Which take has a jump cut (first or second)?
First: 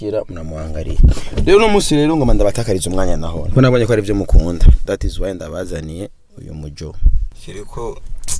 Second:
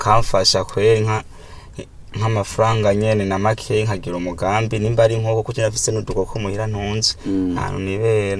first